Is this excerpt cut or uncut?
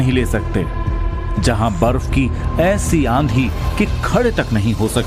uncut